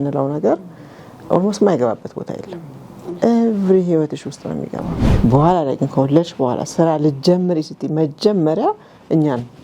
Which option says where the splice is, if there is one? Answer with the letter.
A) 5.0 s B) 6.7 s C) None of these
A